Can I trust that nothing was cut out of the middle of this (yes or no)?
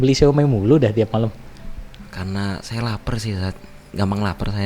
yes